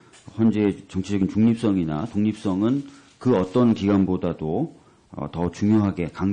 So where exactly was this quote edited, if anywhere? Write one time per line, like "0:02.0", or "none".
0:01.3